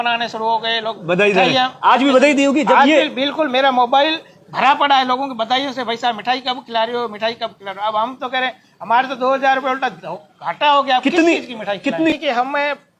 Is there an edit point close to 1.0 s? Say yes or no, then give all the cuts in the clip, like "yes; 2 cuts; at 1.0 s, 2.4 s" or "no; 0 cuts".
no; 1 cut; at 12.1 s